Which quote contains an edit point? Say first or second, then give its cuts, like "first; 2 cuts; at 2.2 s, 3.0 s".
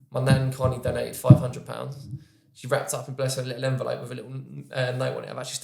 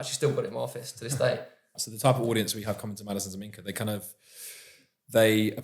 second; 1 cut; at 1.8 s